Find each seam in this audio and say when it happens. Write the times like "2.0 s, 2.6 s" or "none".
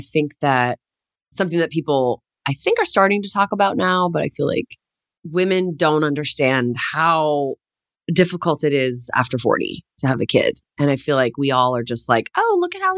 none